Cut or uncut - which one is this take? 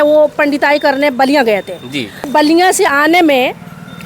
cut